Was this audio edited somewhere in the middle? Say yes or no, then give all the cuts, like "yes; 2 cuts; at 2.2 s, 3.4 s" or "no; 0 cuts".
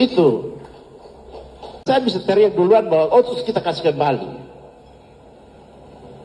yes; 1 cut; at 1.8 s